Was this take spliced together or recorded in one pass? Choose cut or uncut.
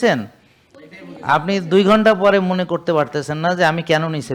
uncut